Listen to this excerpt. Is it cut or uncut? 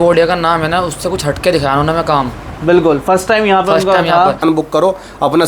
cut